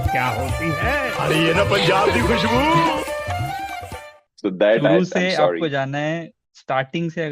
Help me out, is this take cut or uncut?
cut